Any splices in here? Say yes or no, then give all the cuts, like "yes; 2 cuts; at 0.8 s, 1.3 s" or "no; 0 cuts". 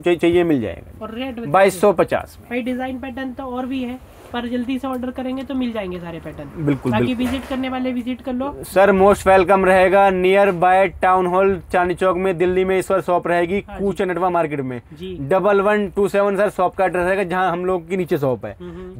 no; 0 cuts